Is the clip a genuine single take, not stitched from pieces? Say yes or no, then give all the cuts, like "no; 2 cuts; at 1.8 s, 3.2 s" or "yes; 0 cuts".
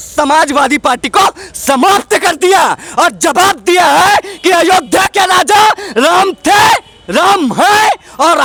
yes; 0 cuts